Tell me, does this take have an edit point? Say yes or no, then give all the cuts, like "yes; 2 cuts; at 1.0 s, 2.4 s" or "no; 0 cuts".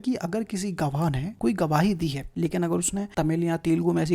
yes; 3 cuts; at 1.3 s, 2.2 s, 3.1 s